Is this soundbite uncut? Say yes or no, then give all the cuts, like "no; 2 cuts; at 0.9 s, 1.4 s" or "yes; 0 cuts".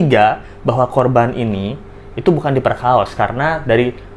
yes; 0 cuts